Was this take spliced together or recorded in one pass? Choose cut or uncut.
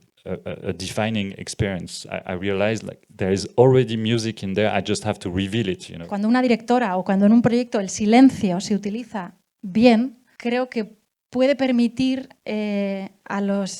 cut